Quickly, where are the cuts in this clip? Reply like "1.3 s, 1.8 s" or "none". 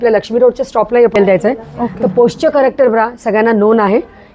1.1 s